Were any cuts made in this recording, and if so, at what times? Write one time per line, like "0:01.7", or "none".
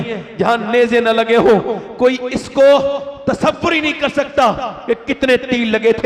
none